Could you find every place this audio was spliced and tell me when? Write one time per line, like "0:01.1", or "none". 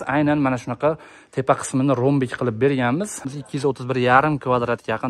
0:03.3